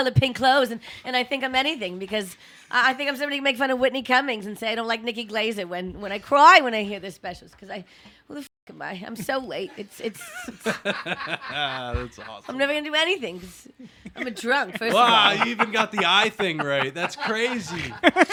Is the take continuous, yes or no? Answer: yes